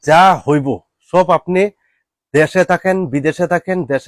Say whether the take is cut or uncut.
uncut